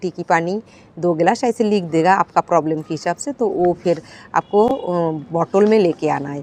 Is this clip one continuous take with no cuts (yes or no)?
yes